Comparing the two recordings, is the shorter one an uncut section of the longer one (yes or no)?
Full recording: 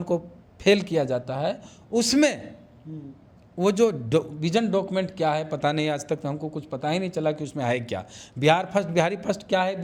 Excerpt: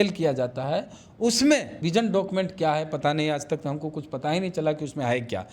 no